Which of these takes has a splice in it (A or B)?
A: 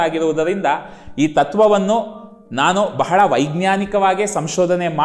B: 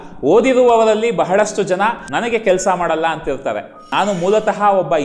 B